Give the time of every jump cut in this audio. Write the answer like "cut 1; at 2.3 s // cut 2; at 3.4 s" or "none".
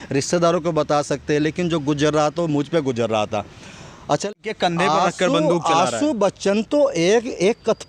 cut 1; at 4.2 s